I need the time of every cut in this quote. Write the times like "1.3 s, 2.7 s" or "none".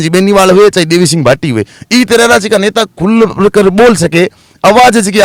none